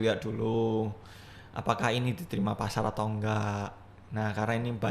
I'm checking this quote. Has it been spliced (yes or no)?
no